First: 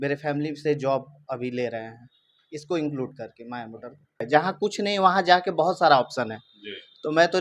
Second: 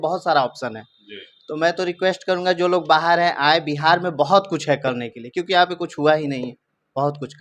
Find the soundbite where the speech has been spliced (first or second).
first